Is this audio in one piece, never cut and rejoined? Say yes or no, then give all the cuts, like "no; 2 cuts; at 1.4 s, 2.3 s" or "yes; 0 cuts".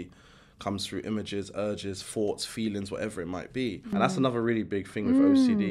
no; 1 cut; at 3.9 s